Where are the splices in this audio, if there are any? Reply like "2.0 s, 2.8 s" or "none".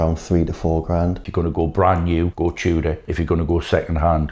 1.2 s, 2.3 s, 3.0 s